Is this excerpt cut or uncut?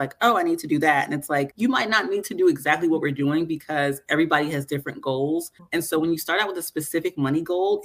cut